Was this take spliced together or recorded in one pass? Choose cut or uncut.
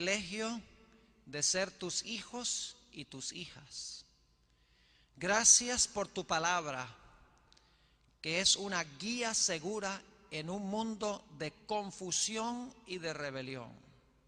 uncut